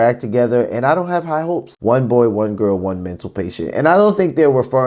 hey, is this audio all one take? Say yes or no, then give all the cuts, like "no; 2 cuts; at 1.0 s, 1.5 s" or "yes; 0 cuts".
no; 1 cut; at 1.7 s